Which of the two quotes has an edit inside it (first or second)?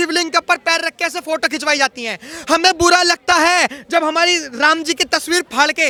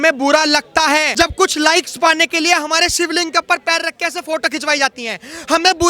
second